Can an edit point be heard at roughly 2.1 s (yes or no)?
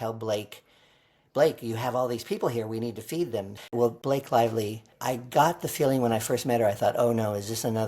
no